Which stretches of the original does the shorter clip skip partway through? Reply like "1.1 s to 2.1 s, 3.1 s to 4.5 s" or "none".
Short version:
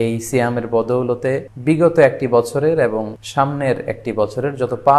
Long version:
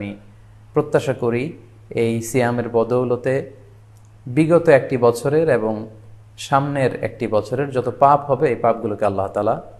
3.5 s to 4.2 s, 5.9 s to 6.3 s